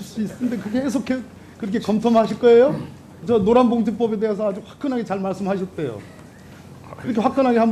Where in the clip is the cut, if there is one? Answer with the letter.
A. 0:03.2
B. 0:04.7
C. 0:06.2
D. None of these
A